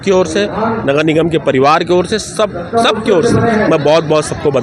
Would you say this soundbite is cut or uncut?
uncut